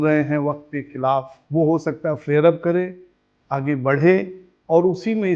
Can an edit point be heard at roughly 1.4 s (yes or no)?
yes